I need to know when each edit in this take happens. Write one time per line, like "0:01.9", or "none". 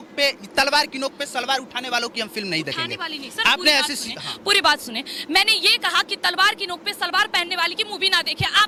none